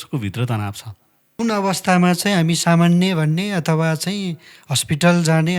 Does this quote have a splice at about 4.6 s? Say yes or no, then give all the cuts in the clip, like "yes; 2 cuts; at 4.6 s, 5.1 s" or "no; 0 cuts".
no; 1 cut; at 1.2 s